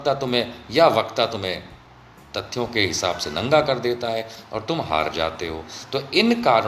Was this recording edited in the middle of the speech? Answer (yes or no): no